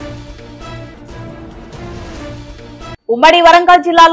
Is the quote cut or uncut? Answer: cut